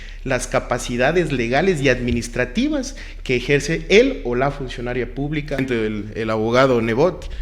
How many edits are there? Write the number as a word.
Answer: one